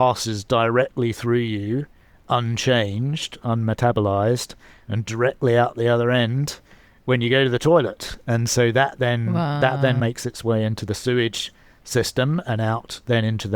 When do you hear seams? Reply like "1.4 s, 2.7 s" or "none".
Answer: 10.0 s

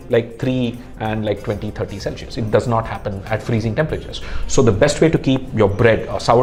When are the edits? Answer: none

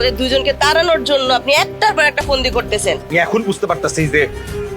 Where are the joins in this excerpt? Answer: 3.0 s

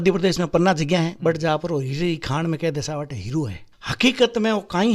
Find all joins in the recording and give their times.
none

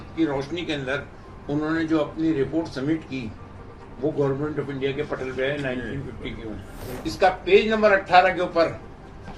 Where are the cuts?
6.8 s

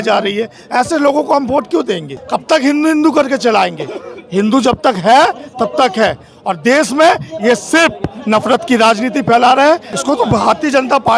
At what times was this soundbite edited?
2.2 s, 9.9 s

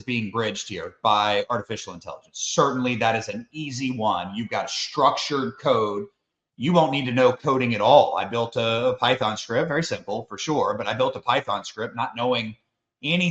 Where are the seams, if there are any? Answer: none

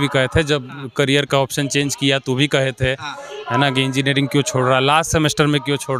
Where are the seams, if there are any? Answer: none

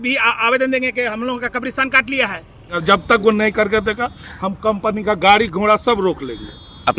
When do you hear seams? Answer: 2.8 s

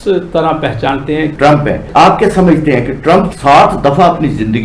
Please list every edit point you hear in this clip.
1.3 s

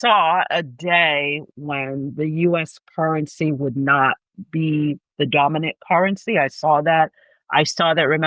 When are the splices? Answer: none

